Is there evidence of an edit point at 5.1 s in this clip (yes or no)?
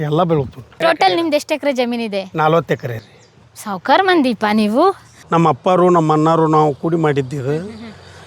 yes